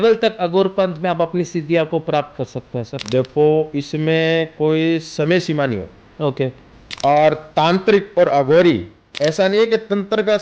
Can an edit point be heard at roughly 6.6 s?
no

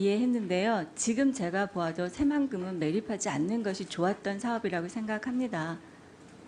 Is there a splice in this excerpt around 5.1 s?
yes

